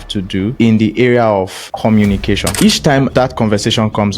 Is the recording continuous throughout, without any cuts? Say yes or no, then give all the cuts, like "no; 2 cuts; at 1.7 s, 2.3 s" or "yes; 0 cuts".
no; 1 cut; at 2.5 s